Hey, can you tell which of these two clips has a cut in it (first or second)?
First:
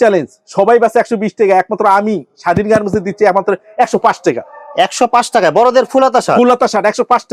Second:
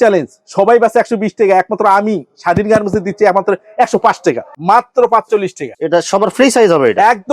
second